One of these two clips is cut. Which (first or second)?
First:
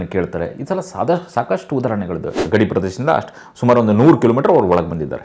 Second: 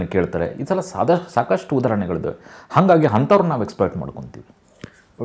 first